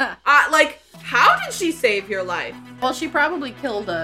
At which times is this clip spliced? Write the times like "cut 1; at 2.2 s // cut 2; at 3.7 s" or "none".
cut 1; at 2.8 s